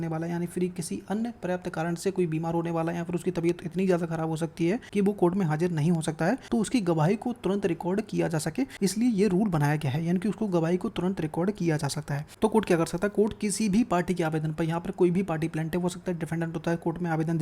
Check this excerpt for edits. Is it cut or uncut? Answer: cut